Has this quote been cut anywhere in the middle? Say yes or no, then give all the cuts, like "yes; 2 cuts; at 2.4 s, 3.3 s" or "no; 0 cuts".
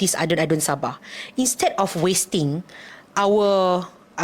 no; 0 cuts